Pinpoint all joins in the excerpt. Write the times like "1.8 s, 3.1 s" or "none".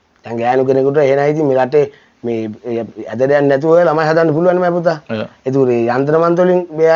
none

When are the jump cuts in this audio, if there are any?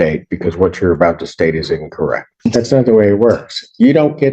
2.3 s

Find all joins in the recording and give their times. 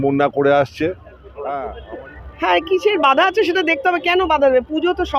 1.6 s

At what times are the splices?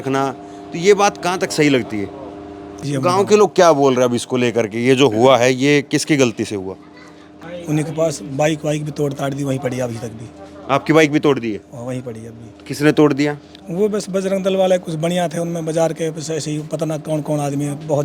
2.8 s, 7.5 s

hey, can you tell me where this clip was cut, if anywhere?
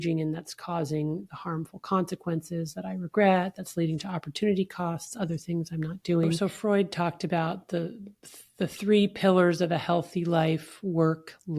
6.4 s

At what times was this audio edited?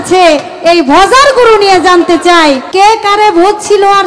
2.6 s

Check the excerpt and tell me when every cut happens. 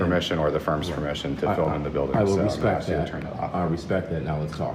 none

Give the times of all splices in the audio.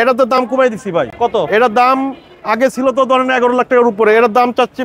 none

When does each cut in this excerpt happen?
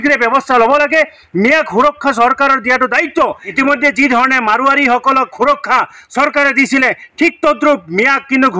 3.5 s

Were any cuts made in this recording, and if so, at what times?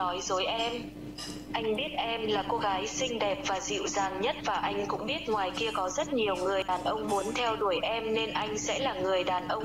6.7 s

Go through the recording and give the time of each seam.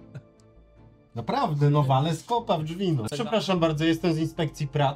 3.1 s

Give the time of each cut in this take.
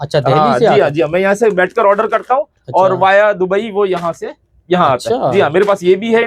none

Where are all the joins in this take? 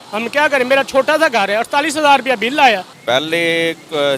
3.2 s

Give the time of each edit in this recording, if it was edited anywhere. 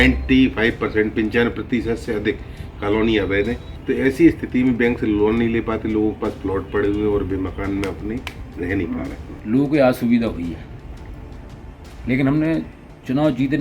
3.7 s, 9.3 s

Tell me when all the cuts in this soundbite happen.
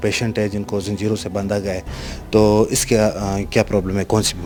none

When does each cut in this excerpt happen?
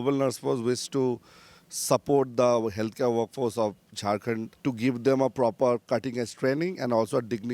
4.5 s

